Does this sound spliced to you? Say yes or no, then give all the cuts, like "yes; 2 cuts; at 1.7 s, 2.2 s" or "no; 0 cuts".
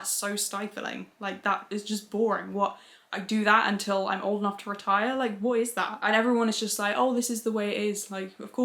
no; 0 cuts